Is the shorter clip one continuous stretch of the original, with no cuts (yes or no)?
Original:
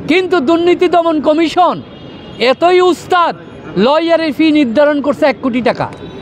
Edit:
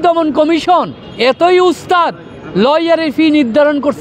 no